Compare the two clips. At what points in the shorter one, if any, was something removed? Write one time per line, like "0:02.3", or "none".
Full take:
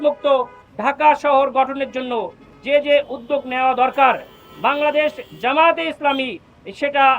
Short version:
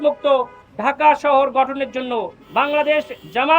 0:02.4